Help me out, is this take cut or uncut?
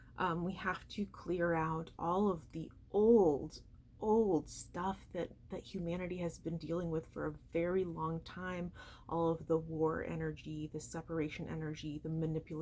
uncut